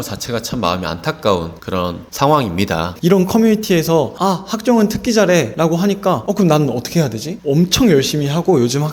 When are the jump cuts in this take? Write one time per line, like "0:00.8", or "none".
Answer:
0:01.7
0:02.9
0:05.8
0:07.3